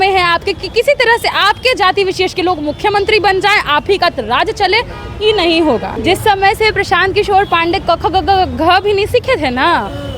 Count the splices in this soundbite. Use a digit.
1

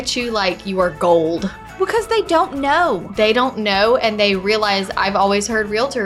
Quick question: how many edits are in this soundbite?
1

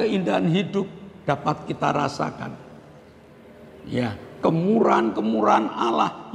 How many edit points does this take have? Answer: 0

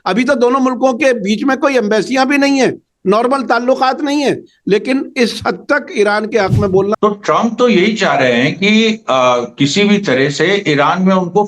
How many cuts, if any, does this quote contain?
1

